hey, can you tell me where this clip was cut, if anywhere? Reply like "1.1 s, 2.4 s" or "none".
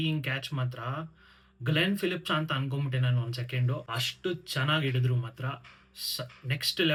none